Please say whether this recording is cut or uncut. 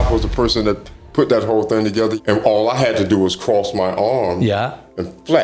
cut